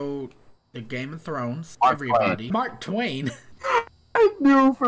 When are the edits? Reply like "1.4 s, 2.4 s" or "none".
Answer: 1.7 s, 2.5 s, 3.5 s